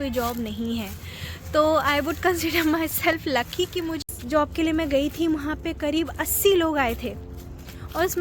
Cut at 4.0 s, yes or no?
yes